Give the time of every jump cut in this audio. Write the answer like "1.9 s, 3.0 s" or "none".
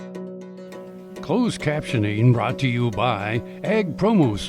1.2 s